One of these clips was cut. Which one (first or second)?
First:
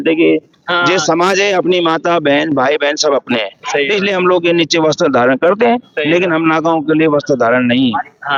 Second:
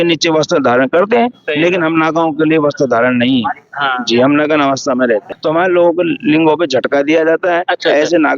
second